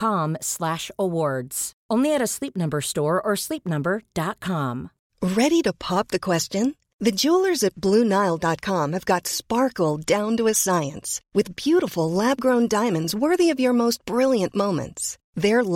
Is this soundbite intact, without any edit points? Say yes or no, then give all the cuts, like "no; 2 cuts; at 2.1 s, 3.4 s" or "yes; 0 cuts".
no; 1 cut; at 5.0 s